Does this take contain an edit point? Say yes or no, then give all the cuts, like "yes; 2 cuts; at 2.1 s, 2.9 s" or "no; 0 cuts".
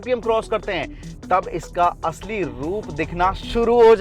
no; 0 cuts